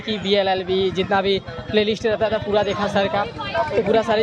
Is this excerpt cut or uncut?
uncut